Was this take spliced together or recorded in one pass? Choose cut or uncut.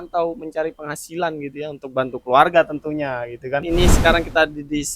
cut